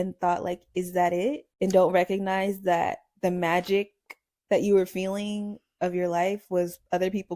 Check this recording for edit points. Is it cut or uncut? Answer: cut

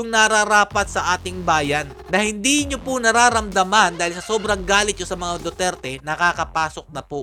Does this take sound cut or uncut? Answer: uncut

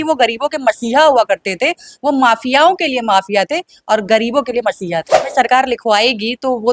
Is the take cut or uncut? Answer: cut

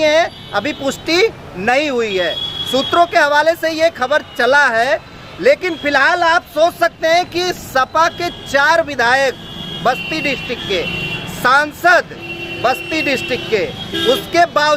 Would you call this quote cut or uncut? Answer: uncut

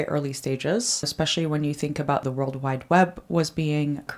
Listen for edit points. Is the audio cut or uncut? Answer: cut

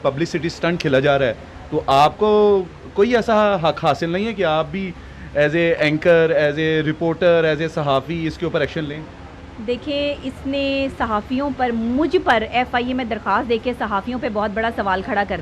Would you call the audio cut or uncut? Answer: uncut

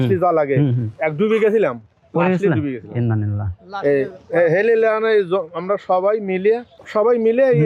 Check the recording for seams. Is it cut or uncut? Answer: uncut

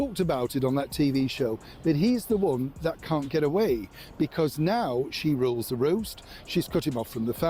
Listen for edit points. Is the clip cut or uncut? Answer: uncut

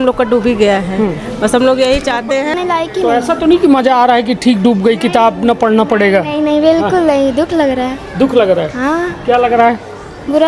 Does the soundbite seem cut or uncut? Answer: cut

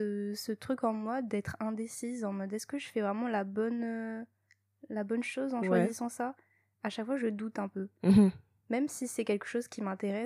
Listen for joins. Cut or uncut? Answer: uncut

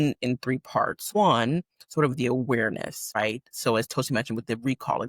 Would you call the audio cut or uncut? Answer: cut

